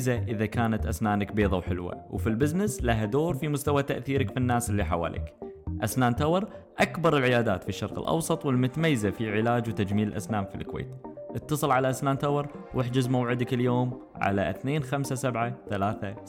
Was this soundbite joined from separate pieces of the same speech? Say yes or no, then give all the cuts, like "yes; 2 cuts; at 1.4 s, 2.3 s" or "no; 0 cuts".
no; 0 cuts